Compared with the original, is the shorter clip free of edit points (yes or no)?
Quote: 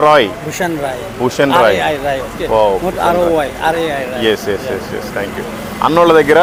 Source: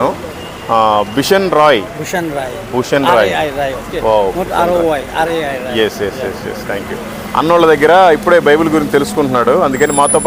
yes